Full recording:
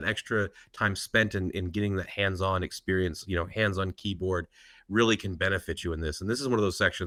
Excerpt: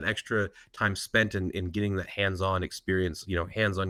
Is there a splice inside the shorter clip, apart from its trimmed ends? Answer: no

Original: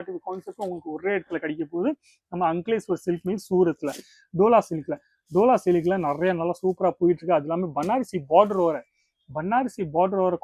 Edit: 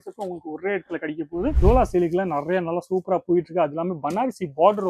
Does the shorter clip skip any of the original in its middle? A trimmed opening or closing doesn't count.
yes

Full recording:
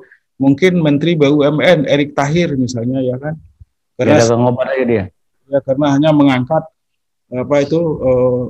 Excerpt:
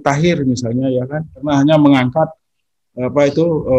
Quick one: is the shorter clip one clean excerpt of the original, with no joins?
no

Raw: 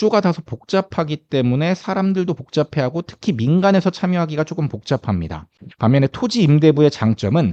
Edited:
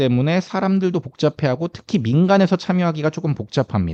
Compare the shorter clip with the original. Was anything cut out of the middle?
no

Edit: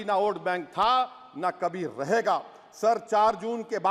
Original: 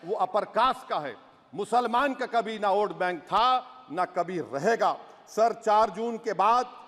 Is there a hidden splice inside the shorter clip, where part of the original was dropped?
no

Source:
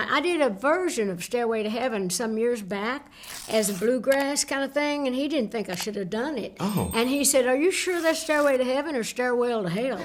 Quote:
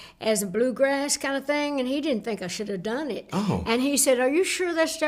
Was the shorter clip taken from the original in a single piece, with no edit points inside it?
yes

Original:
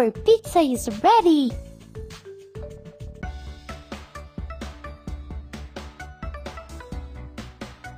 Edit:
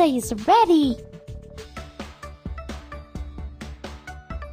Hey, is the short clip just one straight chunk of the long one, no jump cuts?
no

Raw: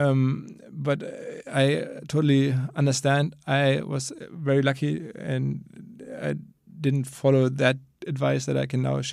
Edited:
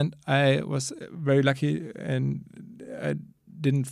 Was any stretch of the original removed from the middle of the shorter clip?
no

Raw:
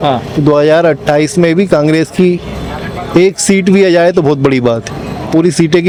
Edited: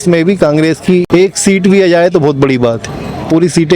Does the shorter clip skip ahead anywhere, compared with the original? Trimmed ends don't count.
yes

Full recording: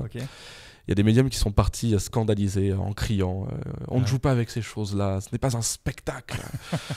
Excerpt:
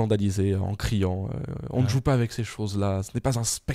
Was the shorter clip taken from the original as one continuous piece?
yes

